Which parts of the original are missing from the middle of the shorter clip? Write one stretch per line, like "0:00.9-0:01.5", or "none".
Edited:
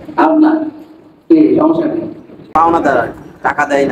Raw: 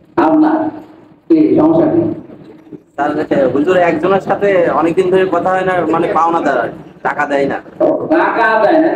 0:02.5-0:06.1